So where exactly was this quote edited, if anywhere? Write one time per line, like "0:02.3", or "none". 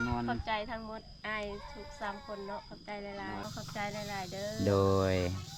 0:03.4